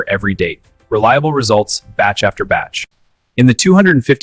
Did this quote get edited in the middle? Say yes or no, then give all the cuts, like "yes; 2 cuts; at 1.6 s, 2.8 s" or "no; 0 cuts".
yes; 1 cut; at 2.8 s